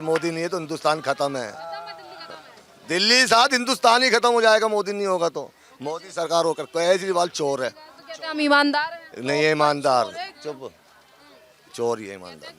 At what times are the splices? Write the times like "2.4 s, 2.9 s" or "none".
none